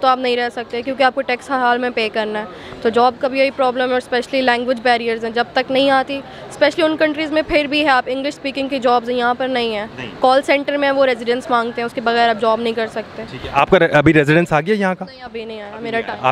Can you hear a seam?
no; 0 cuts

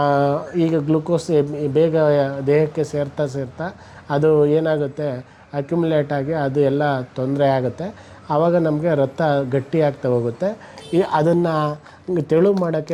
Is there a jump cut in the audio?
no; 0 cuts

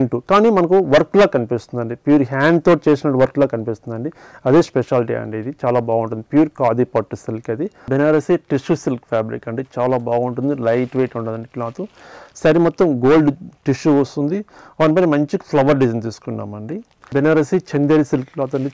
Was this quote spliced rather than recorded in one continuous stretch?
yes; 2 cuts; at 7.9 s, 17.1 s

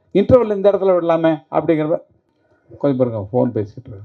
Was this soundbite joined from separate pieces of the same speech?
no; 0 cuts

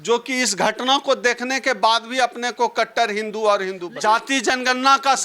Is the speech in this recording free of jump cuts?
no; 1 cut; at 3.8 s

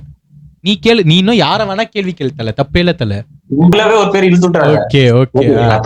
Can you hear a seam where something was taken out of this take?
yes; 1 cut; at 3.7 s

